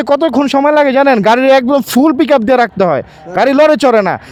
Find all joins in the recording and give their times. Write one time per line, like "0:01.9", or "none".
none